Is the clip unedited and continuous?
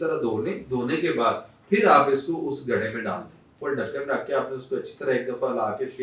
no; 1 cut; at 3.6 s

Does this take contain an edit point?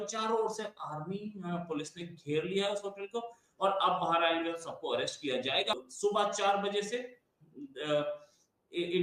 yes; 1 cut; at 5.8 s

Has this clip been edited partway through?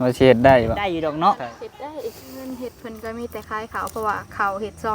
yes; 2 cuts; at 0.9 s, 2.8 s

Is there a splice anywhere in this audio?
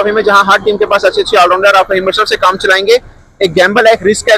no; 0 cuts

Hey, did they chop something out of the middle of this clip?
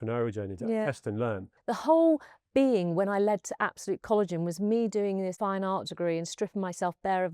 yes; 2 cuts; at 1.5 s, 5.4 s

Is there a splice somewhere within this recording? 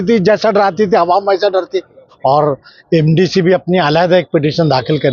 yes; 1 cut; at 2.0 s

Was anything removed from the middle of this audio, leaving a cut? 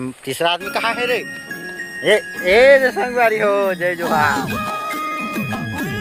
no; 0 cuts

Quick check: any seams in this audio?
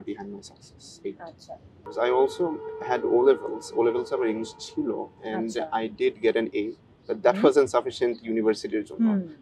no; 0 cuts

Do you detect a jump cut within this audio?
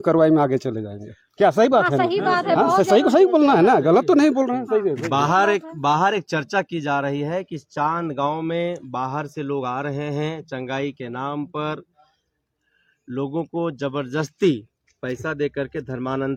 no; 0 cuts

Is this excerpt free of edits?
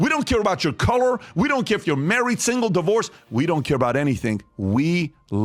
yes; 0 cuts

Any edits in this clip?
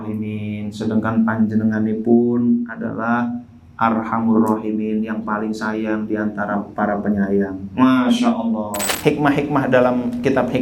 yes; 1 cut; at 8.9 s

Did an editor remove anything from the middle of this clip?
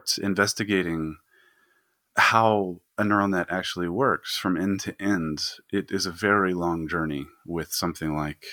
no; 0 cuts

